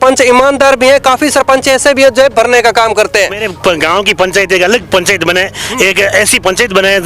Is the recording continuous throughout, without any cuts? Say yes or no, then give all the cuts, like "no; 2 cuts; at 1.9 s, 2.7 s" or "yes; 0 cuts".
no; 1 cut; at 3.5 s